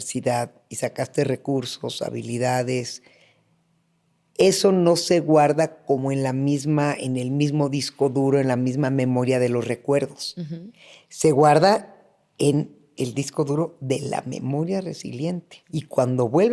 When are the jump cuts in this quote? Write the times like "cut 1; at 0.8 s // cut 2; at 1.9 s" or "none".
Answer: cut 1; at 15.5 s